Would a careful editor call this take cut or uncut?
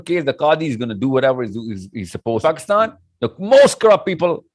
cut